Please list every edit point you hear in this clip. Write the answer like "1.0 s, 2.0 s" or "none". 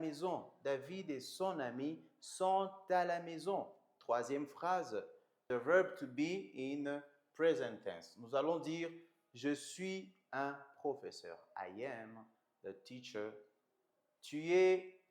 5.4 s